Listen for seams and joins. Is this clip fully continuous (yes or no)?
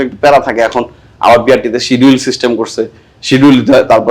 yes